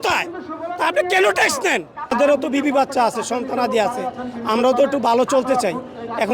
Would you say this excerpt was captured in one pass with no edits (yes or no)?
no